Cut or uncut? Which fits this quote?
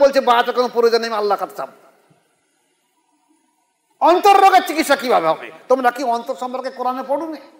cut